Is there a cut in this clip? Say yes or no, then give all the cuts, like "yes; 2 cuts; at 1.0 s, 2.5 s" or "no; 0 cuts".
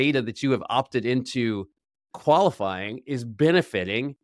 no; 0 cuts